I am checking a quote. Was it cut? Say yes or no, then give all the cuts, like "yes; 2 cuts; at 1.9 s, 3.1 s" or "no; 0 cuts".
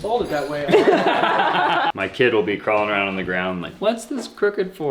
yes; 1 cut; at 1.9 s